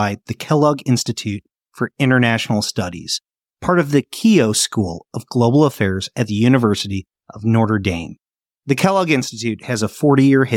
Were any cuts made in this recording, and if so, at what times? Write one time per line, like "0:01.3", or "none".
none

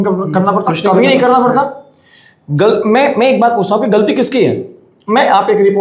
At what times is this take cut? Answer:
none

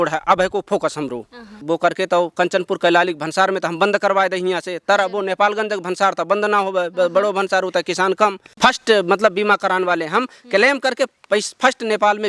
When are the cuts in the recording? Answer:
0:01.5
0:08.5

